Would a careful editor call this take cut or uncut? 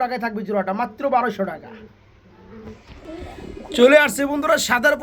uncut